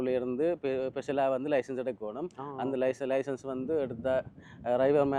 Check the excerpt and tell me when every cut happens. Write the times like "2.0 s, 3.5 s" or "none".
none